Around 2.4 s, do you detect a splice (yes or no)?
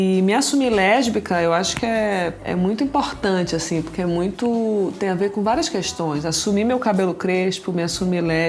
yes